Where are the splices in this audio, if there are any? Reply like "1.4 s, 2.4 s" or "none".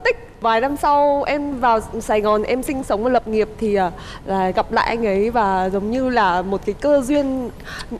none